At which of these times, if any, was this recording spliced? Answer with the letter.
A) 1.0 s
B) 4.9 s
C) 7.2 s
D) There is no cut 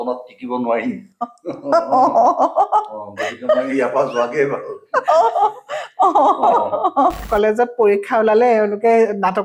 C